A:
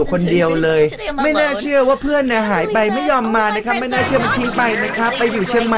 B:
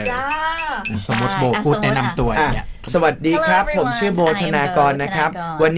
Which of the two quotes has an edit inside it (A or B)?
B